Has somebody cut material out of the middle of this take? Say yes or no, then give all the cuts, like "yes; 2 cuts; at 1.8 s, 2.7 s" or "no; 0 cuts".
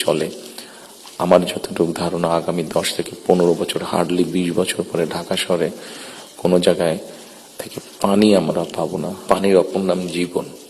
yes; 1 cut; at 9.1 s